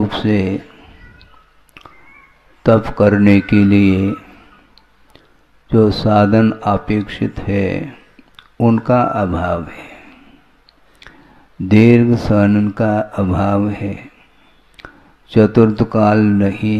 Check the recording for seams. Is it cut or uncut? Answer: uncut